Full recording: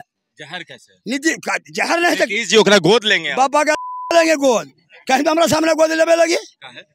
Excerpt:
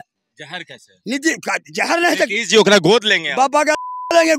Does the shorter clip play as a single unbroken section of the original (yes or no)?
yes